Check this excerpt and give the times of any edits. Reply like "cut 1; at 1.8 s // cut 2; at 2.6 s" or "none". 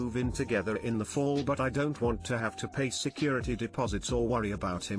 none